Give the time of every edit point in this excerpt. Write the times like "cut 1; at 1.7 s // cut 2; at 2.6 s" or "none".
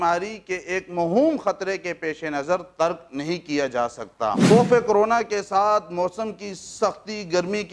cut 1; at 4.4 s

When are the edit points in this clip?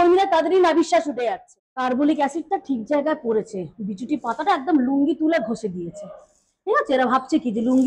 cut 1; at 1.1 s

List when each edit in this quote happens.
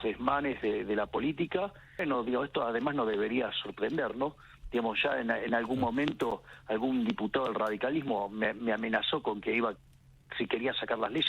cut 1; at 2.0 s

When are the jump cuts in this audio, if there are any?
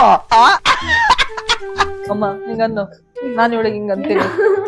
cut 1; at 2.0 s

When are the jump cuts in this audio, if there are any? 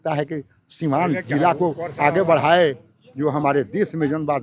none

